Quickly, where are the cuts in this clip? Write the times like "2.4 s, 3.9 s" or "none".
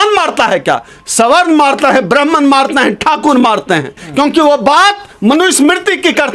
4.0 s